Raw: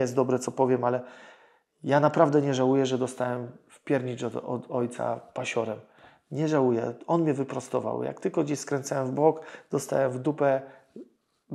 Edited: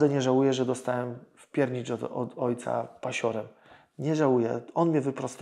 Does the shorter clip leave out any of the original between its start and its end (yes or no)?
no